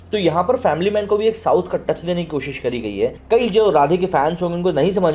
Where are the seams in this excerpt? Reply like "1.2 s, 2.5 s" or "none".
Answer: 3.2 s